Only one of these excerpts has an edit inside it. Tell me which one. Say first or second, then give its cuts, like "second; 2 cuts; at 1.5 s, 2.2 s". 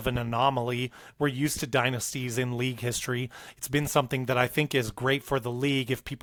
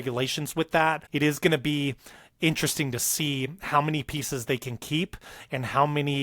second; 1 cut; at 1.1 s